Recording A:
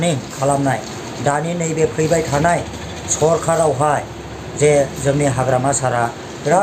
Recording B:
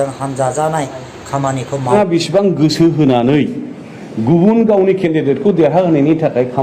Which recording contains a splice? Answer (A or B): B